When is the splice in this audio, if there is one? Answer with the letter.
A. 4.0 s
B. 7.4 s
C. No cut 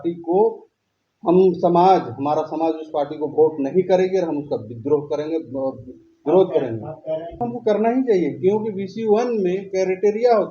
B